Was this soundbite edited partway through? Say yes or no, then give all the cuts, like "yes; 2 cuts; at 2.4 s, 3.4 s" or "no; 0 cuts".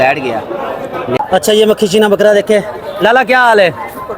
yes; 1 cut; at 1.2 s